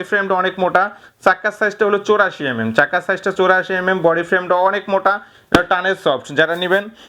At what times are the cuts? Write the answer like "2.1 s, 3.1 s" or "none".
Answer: none